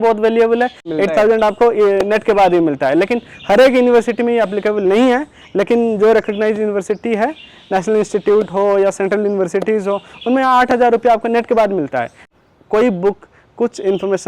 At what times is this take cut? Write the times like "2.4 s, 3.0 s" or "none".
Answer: 0.8 s, 12.2 s